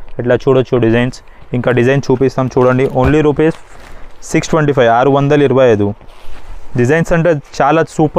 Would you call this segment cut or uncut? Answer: uncut